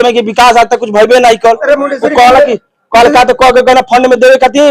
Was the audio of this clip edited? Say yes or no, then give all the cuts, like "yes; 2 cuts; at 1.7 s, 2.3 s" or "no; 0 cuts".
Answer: no; 0 cuts